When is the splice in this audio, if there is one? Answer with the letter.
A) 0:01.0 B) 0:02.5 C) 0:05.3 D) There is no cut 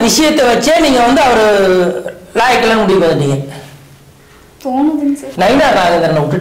C